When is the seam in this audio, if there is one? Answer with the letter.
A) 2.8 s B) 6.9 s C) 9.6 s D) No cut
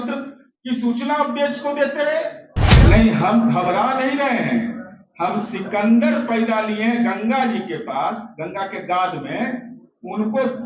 A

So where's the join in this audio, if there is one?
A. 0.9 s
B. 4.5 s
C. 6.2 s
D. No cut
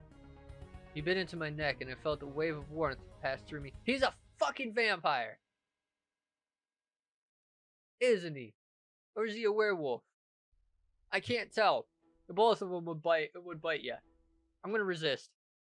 A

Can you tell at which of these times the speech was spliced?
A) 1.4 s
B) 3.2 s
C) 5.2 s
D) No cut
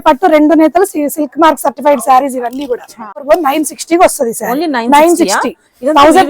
B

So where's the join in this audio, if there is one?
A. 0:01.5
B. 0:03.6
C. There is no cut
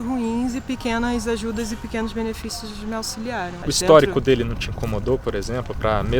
B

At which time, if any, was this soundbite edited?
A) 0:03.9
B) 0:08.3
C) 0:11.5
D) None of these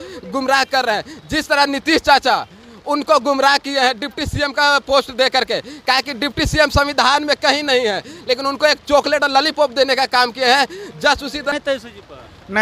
C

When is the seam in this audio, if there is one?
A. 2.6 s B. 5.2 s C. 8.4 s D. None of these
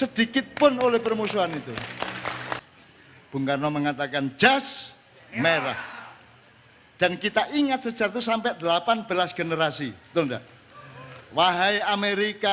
A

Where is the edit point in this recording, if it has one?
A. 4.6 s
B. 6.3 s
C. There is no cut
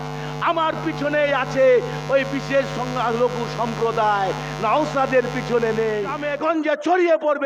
B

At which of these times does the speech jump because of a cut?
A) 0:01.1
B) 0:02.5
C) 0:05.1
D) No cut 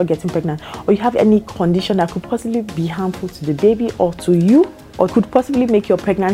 C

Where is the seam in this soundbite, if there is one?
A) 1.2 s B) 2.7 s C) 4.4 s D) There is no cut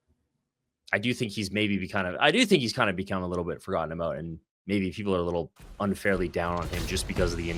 D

